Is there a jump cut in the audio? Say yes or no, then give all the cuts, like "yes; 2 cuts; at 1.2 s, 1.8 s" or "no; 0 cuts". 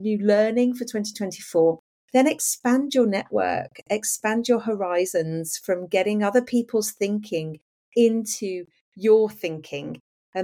yes; 1 cut; at 1.9 s